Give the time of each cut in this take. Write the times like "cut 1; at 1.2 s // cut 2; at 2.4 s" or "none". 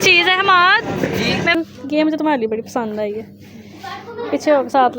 cut 1; at 1.5 s

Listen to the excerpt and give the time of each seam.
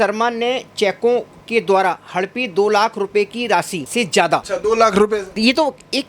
cut 1; at 4.2 s // cut 2; at 5.3 s

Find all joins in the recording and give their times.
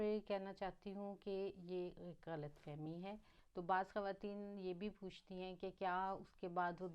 cut 1; at 3.4 s

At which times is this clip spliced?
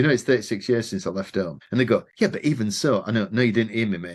cut 1; at 1.6 s

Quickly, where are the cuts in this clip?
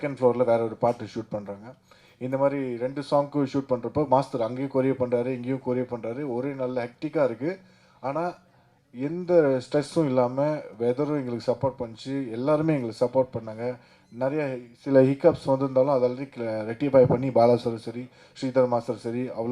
none

